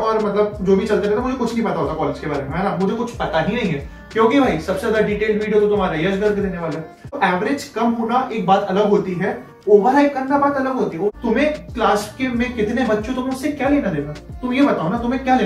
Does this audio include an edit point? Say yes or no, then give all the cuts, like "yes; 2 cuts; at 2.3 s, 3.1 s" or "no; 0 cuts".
yes; 2 cuts; at 7.2 s, 11.1 s